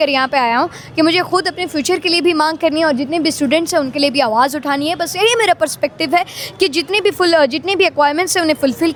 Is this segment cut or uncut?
uncut